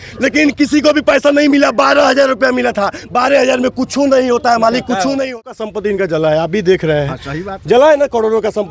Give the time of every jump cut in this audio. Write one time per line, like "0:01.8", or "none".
0:05.5